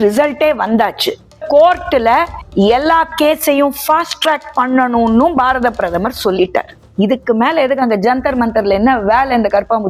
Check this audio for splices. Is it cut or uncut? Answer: cut